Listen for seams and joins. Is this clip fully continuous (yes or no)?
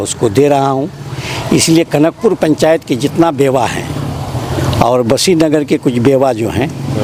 yes